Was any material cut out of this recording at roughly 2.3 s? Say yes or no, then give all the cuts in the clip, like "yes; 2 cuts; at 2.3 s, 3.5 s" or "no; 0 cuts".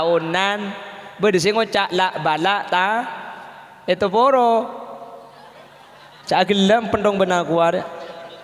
no; 0 cuts